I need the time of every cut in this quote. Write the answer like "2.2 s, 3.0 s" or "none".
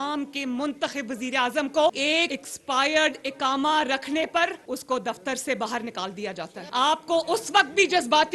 2.1 s, 4.6 s, 6.6 s